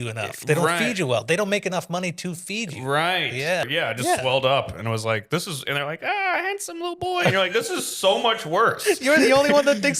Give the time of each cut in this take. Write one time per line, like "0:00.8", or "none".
0:03.6